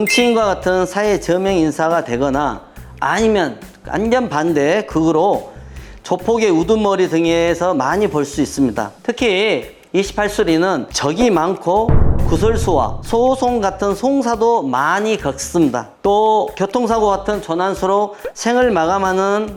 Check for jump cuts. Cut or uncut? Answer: uncut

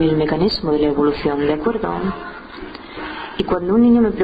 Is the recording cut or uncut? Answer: uncut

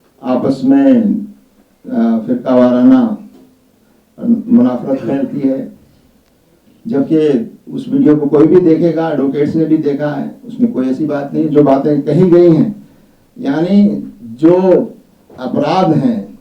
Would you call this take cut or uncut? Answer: uncut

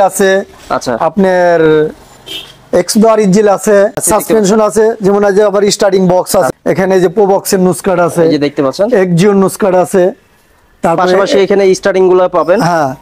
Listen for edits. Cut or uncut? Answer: cut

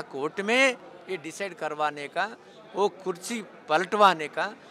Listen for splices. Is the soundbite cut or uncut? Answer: uncut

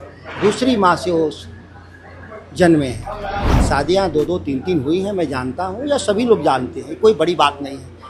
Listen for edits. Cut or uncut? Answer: cut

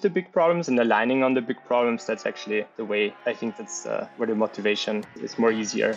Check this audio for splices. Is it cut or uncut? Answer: uncut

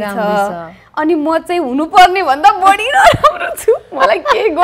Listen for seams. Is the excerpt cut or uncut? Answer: uncut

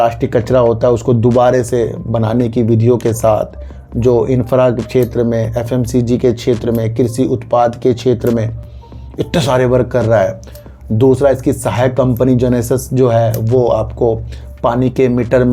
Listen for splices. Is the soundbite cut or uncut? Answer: uncut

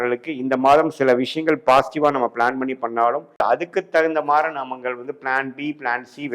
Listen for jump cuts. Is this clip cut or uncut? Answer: cut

